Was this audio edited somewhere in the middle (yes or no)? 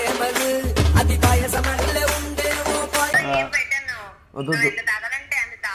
no